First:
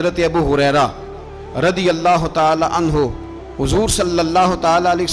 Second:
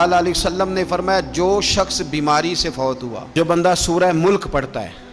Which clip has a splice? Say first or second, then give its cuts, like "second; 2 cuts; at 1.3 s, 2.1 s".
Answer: second; 1 cut; at 3.3 s